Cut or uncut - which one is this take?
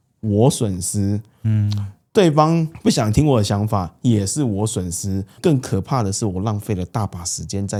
uncut